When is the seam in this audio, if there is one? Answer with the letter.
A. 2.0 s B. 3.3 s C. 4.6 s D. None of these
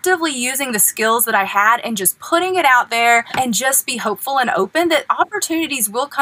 B